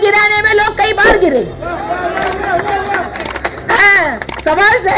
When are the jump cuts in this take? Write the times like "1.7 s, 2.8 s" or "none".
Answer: none

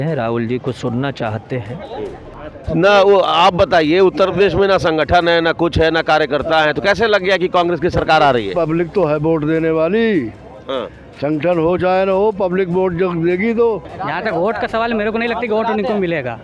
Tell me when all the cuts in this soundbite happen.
2.3 s, 13.9 s

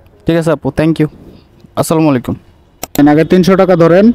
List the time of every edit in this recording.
3.0 s

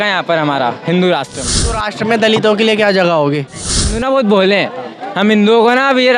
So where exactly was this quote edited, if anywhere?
1.8 s, 3.9 s

